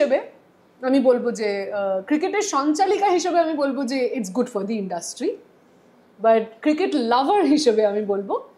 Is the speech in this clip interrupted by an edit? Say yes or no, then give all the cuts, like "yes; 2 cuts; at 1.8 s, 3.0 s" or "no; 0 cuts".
no; 0 cuts